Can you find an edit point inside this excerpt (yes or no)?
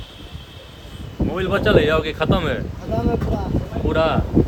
no